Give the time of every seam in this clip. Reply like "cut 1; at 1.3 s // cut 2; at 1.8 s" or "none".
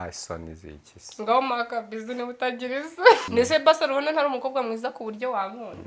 cut 1; at 3.3 s